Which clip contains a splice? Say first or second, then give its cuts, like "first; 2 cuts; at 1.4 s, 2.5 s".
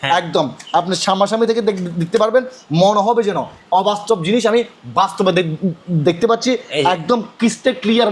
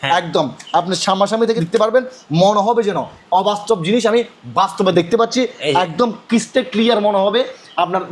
second; 2 cuts; at 1.6 s, 4.9 s